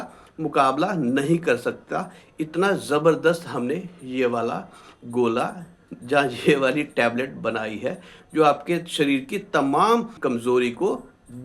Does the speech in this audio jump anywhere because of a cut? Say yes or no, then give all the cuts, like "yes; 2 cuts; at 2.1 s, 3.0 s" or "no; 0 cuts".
yes; 1 cut; at 10.1 s